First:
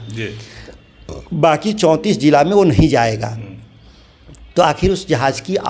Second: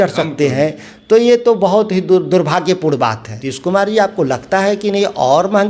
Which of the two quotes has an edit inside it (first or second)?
second